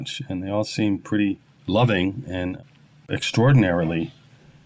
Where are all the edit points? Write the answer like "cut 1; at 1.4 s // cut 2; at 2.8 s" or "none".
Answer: cut 1; at 1.5 s // cut 2; at 3.2 s